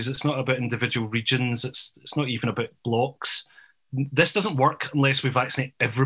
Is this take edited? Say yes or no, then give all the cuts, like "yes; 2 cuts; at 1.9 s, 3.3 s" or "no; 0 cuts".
no; 0 cuts